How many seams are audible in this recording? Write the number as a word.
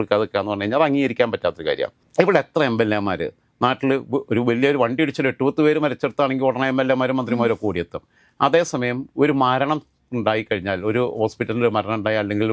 zero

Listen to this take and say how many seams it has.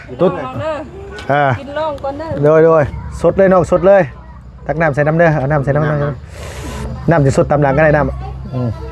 one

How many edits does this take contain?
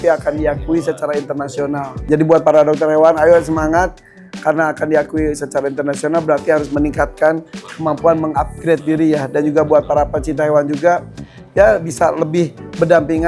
one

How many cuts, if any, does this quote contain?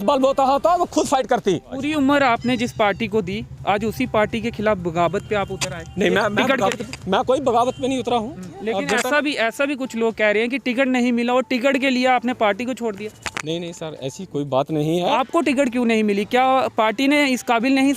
three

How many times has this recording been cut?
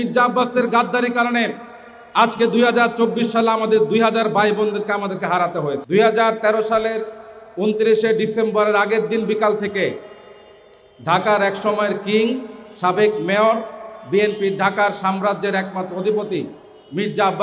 one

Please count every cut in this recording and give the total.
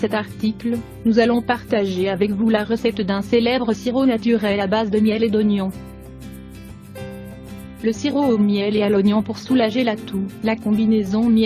one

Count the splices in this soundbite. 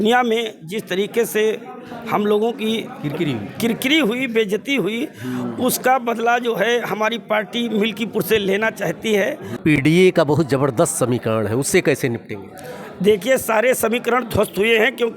one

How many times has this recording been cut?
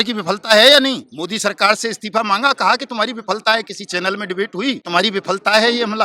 two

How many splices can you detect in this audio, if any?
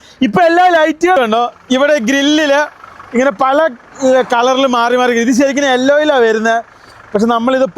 one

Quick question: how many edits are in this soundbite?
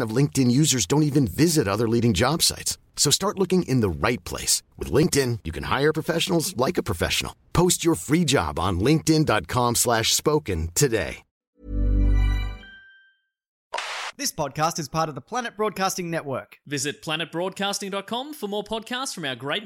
one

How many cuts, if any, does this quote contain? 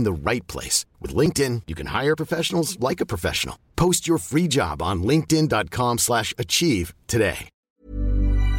one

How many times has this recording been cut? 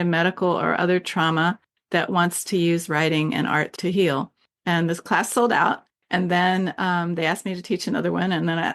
one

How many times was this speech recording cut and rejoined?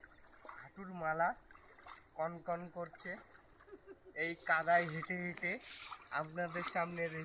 zero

